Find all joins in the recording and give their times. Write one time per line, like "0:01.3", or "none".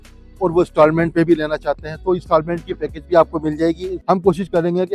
0:03.9